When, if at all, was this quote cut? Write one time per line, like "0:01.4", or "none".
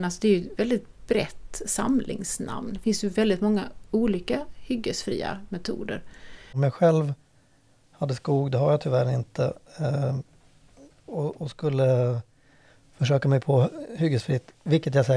0:06.6